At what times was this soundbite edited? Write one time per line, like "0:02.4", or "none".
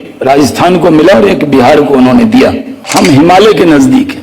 0:02.8